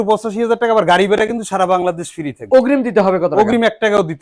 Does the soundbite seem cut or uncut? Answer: uncut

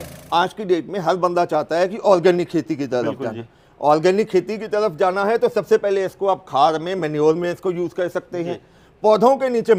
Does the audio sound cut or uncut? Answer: uncut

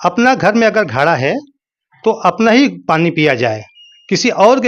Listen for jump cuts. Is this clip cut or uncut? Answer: uncut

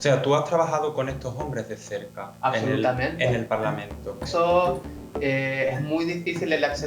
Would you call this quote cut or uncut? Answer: cut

